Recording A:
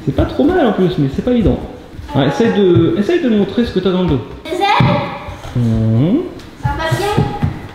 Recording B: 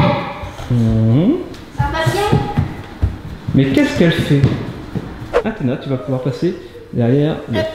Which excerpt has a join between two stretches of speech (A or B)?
B